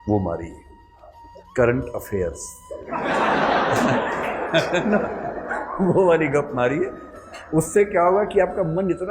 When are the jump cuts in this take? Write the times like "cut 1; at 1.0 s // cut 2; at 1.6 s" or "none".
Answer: cut 1; at 3.8 s